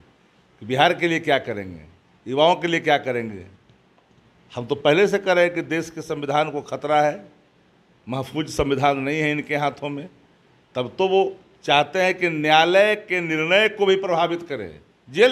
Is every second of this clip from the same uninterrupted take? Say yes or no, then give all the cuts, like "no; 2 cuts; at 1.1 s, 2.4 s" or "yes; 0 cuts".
yes; 0 cuts